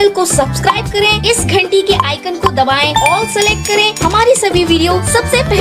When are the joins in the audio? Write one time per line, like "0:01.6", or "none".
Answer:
none